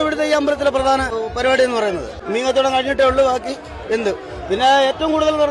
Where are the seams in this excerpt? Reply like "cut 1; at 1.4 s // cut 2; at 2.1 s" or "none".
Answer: cut 1; at 1.1 s // cut 2; at 2.1 s